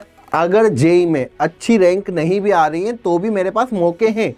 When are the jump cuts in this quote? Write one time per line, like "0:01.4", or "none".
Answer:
none